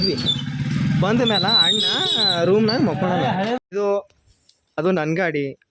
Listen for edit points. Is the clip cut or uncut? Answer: cut